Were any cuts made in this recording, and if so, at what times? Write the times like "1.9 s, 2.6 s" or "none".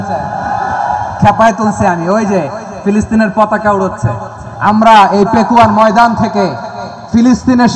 none